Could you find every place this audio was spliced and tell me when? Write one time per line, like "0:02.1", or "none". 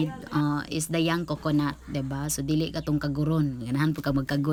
none